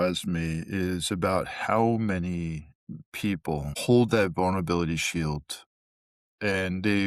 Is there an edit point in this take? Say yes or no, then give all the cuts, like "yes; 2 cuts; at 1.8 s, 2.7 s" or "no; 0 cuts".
yes; 1 cut; at 3.7 s